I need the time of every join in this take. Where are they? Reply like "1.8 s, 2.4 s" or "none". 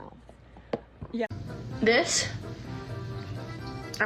1.3 s